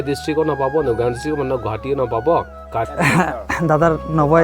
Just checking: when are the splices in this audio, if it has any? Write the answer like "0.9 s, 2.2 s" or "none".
2.9 s